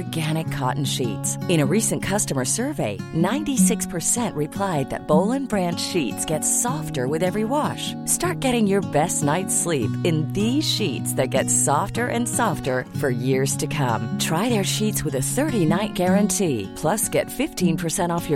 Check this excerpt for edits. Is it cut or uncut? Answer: uncut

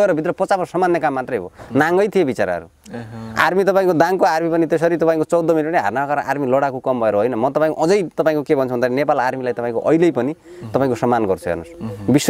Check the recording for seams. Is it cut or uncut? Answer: uncut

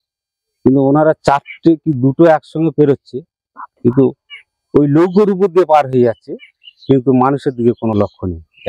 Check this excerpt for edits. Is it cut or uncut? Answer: uncut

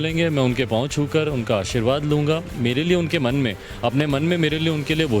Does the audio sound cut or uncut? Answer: uncut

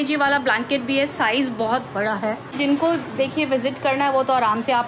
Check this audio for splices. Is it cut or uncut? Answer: cut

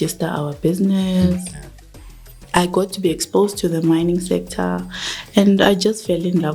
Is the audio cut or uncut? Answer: cut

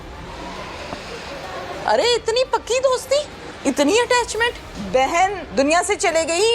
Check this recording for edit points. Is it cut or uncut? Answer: cut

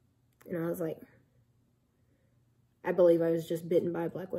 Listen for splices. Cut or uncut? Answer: uncut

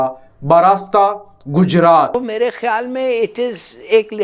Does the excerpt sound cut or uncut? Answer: cut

